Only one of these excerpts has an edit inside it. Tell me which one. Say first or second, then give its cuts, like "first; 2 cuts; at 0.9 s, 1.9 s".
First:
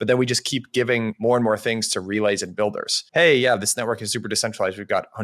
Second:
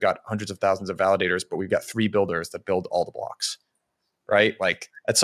first; 2 cuts; at 1.1 s, 2.9 s